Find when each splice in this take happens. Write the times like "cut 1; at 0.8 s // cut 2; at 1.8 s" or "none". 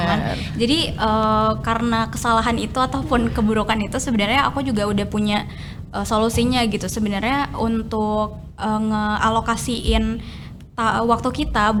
none